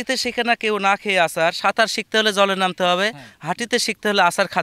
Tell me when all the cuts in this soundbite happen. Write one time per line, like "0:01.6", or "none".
none